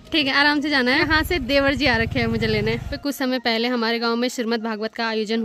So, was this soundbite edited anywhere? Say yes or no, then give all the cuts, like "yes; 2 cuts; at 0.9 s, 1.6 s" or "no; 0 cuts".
yes; 2 cuts; at 1.1 s, 2.9 s